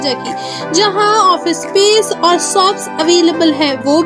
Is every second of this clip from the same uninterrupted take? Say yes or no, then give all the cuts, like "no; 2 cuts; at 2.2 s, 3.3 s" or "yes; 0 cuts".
yes; 0 cuts